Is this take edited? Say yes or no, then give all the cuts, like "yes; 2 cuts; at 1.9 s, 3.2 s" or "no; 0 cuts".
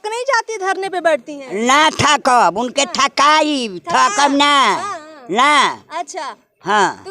no; 0 cuts